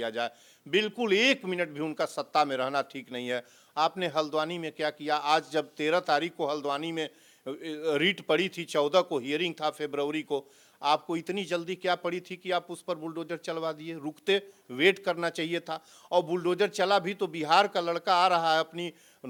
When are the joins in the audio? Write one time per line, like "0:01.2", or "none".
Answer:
none